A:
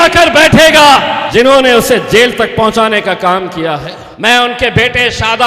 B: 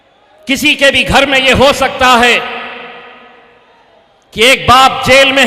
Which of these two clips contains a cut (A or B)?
A